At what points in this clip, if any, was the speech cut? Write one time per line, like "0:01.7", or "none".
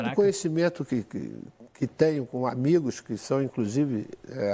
none